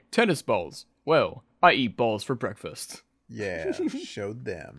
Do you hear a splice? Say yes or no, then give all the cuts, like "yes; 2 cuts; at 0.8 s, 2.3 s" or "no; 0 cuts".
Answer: no; 0 cuts